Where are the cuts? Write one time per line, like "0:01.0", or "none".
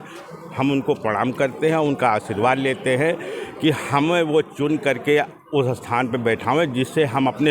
none